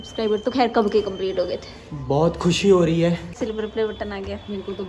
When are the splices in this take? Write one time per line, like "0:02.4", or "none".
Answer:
0:03.3